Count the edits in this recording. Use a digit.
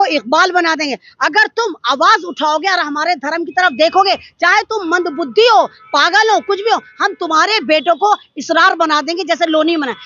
0